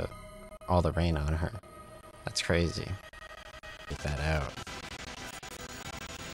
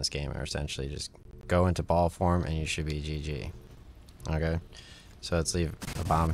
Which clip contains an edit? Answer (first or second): first